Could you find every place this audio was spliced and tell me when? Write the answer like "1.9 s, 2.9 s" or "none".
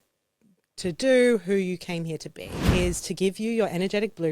2.7 s